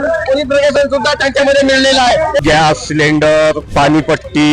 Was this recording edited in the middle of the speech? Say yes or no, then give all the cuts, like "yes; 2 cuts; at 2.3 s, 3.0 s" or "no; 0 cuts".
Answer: yes; 2 cuts; at 2.4 s, 3.6 s